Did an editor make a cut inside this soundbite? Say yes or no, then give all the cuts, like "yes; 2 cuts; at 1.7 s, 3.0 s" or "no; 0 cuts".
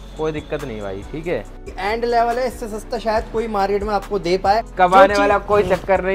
yes; 2 cuts; at 1.7 s, 4.7 s